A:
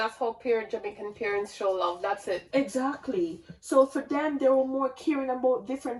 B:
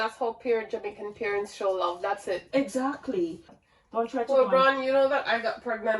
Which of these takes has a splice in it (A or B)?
B